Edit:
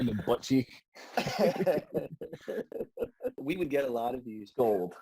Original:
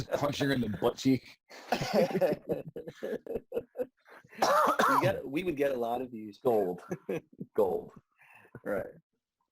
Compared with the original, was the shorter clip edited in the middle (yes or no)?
yes